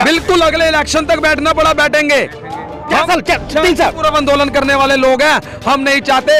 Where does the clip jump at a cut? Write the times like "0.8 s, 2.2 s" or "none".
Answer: none